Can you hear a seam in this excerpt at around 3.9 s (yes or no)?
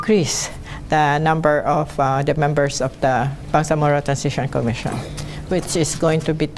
yes